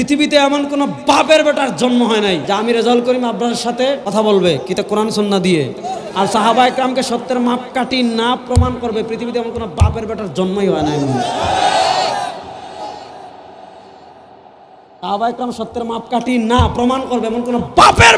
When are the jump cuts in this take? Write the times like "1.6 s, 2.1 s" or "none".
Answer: 2.4 s, 4.0 s